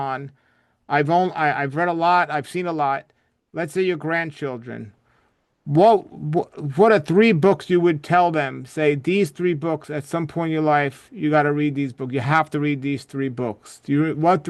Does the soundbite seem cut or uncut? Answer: uncut